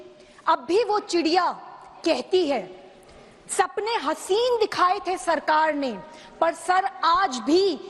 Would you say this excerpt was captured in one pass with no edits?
yes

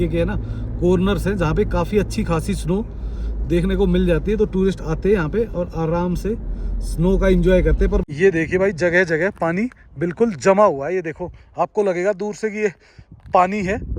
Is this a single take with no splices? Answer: no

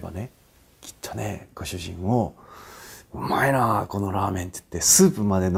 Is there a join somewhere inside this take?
no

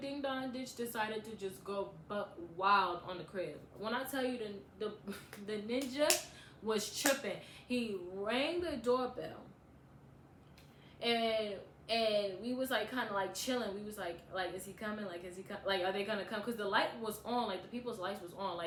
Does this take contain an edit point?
no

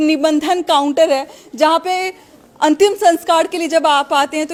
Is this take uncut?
yes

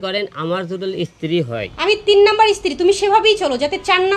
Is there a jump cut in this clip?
yes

